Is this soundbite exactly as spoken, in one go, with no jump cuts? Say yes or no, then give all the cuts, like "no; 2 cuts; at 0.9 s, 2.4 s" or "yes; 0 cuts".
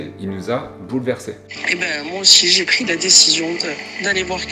yes; 0 cuts